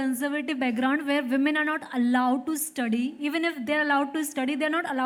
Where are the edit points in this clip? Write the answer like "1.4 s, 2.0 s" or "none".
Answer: none